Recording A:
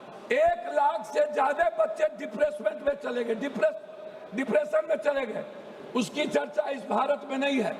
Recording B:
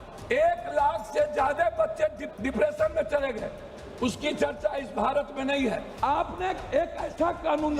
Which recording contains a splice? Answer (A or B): B